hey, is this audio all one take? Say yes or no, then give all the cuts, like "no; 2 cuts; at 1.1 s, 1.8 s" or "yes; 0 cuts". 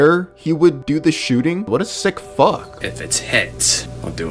no; 2 cuts; at 1.7 s, 2.8 s